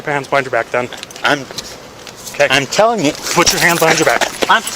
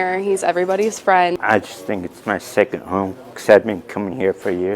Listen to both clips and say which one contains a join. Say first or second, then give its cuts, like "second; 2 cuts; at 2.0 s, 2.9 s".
second; 1 cut; at 1.4 s